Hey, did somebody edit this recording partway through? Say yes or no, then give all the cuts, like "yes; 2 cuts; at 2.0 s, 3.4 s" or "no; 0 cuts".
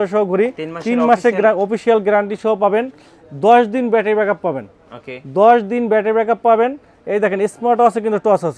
no; 0 cuts